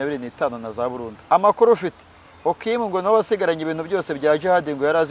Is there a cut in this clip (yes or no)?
yes